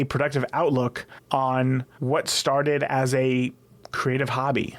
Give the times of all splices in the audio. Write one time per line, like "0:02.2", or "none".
0:01.1
0:01.9